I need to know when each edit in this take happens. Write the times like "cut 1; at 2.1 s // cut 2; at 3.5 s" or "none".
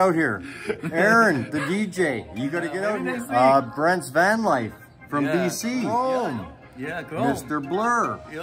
cut 1; at 2.9 s // cut 2; at 5.9 s